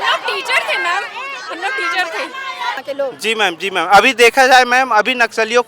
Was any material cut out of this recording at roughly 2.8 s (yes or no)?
yes